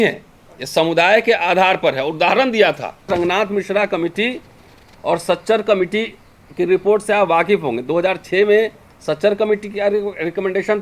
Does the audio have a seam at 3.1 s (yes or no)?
yes